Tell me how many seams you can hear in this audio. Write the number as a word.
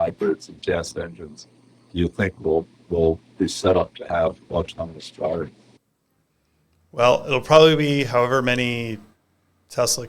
one